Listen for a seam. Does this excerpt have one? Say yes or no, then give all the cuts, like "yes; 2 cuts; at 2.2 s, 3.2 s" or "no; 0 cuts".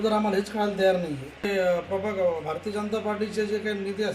yes; 1 cut; at 1.5 s